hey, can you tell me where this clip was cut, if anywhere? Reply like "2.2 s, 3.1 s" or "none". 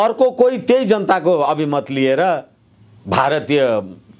none